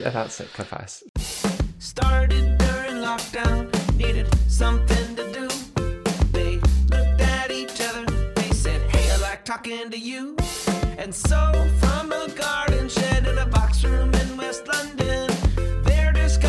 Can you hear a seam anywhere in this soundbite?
yes; 1 cut; at 1.0 s

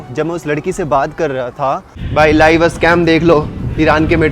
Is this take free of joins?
no; 1 cut; at 1.9 s

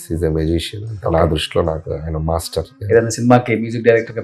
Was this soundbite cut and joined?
yes; 1 cut; at 2.8 s

